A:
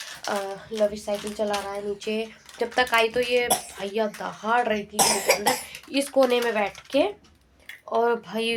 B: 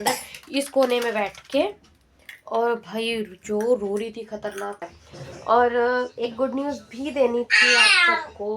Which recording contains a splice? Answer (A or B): B